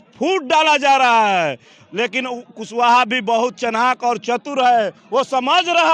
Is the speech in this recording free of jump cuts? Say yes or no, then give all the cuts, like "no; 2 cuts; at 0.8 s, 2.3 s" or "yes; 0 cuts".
yes; 0 cuts